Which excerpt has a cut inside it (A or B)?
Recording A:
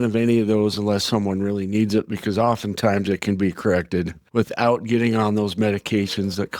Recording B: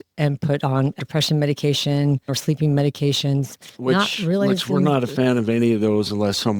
B